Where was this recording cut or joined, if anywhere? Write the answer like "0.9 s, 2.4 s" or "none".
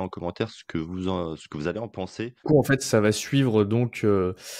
2.4 s